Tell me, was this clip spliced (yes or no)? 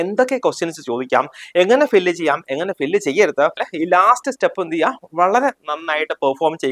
yes